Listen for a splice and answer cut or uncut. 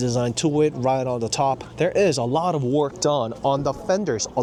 uncut